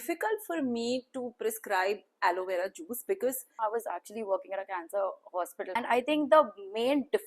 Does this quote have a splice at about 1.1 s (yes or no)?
no